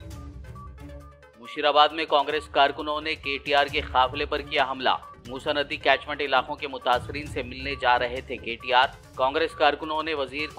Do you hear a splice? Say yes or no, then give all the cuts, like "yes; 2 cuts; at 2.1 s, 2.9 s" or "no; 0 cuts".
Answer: no; 0 cuts